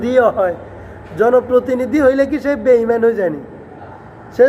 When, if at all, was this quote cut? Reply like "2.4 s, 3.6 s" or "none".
none